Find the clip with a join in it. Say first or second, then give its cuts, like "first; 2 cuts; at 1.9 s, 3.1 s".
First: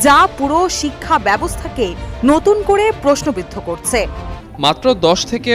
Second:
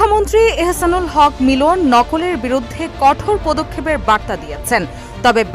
first; 1 cut; at 4.3 s